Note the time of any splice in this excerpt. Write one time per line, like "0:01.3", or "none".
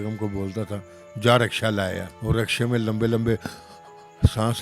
0:02.1